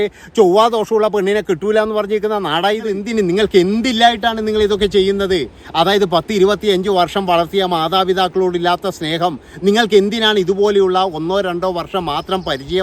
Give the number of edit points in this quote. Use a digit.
1